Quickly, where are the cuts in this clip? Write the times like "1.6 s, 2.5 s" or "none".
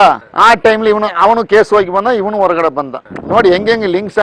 none